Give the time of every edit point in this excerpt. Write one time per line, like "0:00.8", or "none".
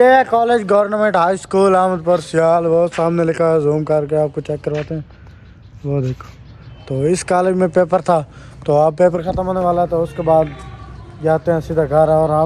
none